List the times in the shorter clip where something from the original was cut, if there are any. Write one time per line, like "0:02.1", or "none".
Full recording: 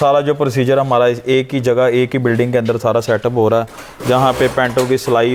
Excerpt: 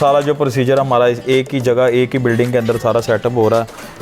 none